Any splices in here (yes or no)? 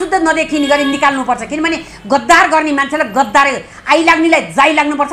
no